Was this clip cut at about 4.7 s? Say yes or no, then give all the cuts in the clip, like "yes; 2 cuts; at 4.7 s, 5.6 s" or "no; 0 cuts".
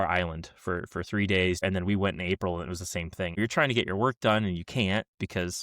no; 2 cuts; at 1.6 s, 3.4 s